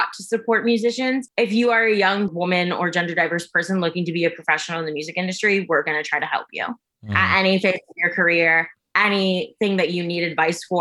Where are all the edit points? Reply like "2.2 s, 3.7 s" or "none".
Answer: 1.3 s, 2.3 s